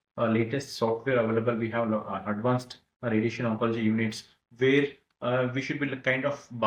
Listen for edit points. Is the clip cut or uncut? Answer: uncut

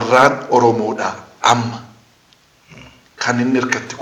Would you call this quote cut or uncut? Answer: uncut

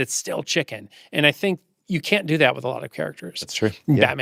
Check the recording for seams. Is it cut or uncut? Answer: uncut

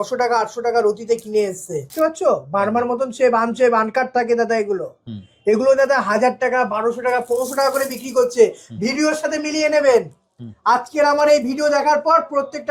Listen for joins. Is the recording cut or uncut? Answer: cut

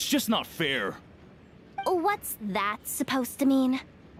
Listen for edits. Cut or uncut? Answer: uncut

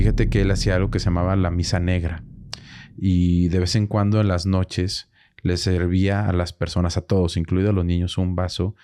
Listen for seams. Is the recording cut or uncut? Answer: uncut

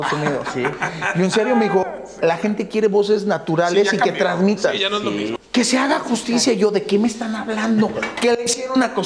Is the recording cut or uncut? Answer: cut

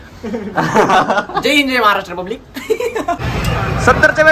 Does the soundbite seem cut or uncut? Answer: cut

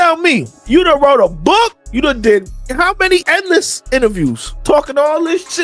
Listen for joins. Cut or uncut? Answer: cut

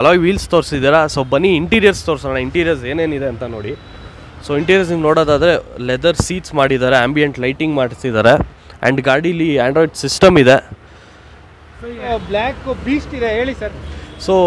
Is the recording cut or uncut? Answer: cut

